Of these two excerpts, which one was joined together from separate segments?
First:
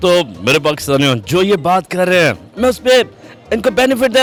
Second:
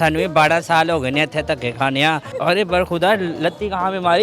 second; 1 cut; at 2.3 s

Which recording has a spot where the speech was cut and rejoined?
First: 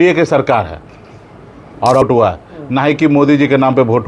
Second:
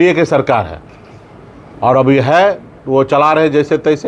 first; 1 cut; at 2.0 s

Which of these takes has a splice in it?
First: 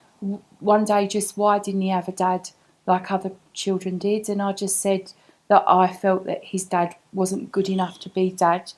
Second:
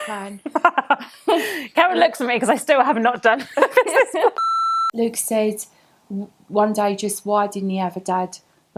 second; 1 cut; at 4.8 s

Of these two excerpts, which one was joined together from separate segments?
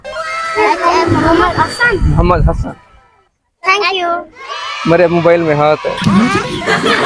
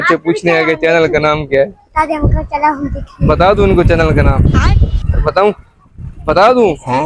first; 1 cut; at 6.1 s

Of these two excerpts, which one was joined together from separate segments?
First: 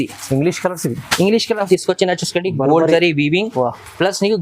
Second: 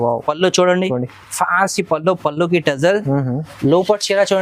first; 1 cut; at 1.7 s

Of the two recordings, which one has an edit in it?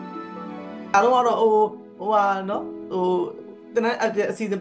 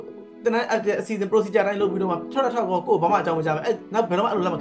first; 1 cut; at 0.9 s

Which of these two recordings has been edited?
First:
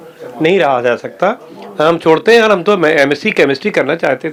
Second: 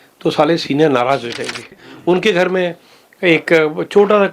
second; 1 cut; at 1.9 s

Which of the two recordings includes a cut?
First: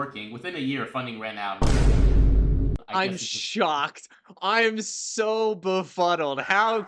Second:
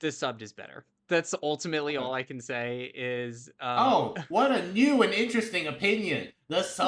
first; 1 cut; at 2.8 s

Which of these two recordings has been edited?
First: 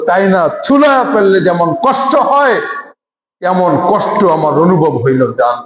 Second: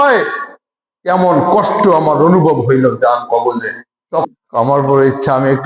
second; 1 cut; at 4.3 s

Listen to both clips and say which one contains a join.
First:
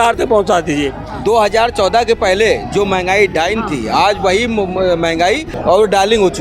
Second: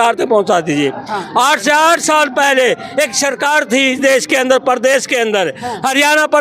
first; 2 cuts; at 1.0 s, 5.5 s

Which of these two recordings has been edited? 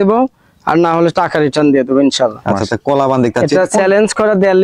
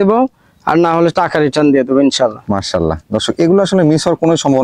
first; 1 cut; at 2.5 s

